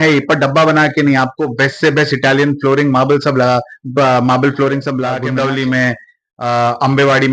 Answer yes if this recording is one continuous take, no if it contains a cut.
no